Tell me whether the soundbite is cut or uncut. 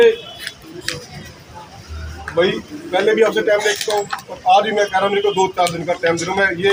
uncut